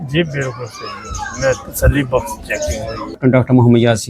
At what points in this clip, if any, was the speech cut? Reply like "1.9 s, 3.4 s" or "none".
3.2 s